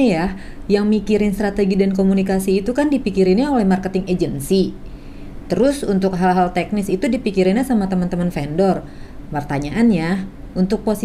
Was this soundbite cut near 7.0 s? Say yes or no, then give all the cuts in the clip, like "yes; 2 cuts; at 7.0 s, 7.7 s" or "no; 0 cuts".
no; 0 cuts